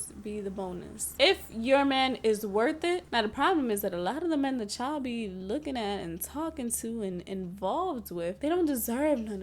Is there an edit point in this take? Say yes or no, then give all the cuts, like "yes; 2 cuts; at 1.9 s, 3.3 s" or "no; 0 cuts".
yes; 2 cuts; at 1.1 s, 3.0 s